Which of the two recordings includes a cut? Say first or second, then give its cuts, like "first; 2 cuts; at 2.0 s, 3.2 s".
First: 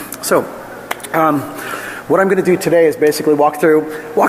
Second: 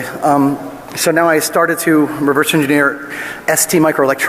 second; 1 cut; at 3.4 s